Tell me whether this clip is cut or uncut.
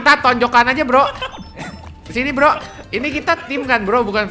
cut